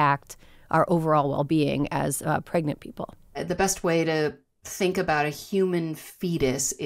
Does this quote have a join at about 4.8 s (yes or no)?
no